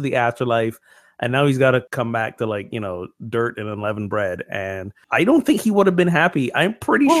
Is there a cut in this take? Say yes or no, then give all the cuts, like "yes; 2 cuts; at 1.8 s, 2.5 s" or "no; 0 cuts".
yes; 2 cuts; at 1.9 s, 4.9 s